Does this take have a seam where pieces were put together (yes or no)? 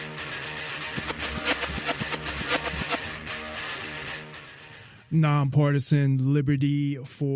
yes